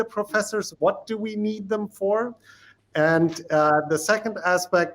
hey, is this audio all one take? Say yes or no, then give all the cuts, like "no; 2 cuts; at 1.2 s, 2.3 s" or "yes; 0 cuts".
yes; 0 cuts